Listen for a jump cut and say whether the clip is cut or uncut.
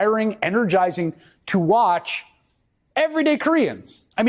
uncut